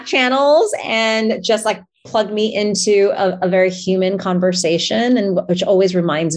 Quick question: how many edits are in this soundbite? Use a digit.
0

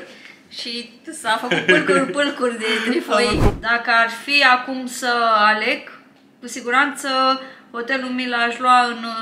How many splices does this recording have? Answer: 1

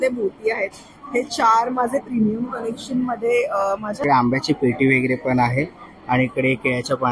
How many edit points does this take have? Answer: 1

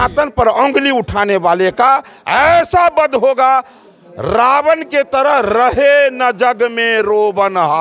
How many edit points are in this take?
0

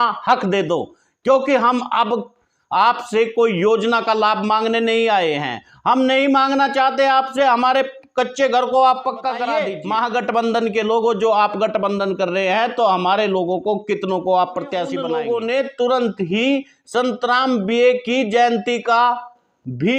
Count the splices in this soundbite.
2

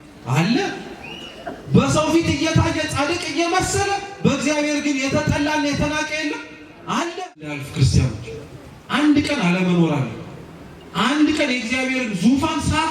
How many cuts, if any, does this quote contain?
1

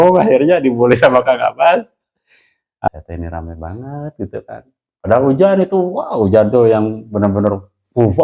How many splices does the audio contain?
1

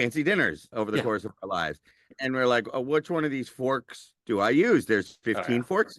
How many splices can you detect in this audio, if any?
1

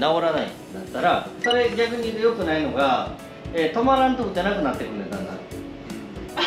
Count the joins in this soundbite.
1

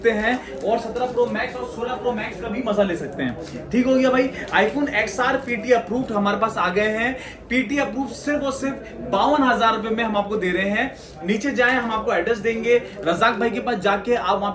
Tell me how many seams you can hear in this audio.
0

